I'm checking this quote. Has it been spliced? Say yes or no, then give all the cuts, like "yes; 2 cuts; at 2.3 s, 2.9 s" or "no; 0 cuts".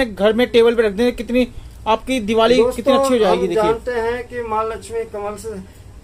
no; 0 cuts